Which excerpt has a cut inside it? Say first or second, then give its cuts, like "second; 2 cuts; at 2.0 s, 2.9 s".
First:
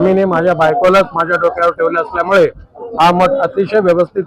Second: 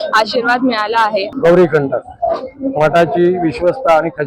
second; 1 cut; at 1.3 s